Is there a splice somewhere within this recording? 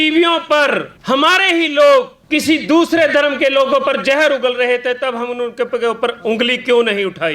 yes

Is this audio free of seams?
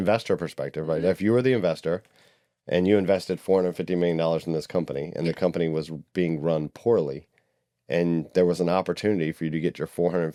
yes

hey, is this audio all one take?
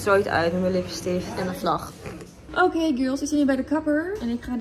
no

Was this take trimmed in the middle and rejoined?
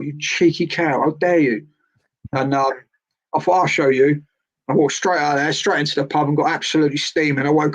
no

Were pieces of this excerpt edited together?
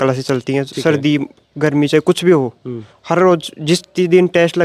no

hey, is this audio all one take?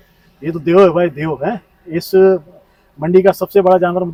yes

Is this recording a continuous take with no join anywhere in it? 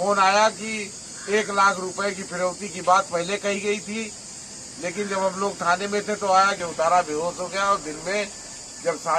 no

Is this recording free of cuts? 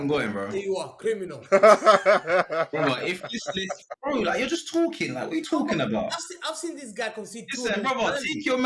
no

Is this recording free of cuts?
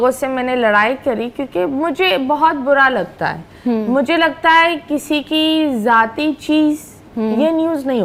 yes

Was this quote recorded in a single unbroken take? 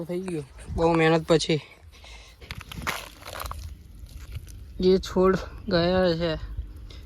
no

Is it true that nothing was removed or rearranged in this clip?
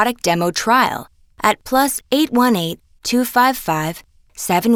yes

